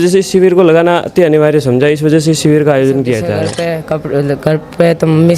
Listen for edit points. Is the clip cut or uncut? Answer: cut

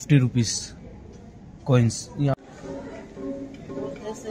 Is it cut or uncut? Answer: cut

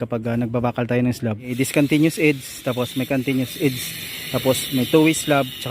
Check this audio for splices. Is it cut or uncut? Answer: cut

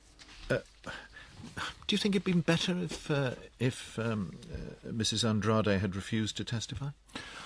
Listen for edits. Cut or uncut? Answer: uncut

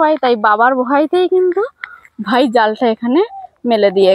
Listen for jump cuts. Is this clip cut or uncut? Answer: uncut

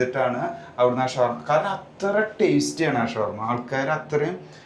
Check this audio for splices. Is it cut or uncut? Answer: uncut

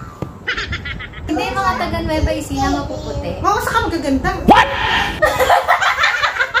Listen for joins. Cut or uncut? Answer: cut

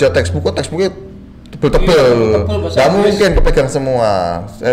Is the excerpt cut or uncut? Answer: uncut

